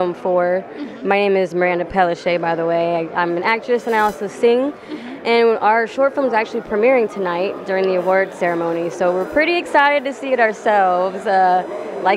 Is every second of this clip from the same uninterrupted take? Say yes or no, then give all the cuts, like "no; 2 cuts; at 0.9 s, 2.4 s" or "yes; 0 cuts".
yes; 0 cuts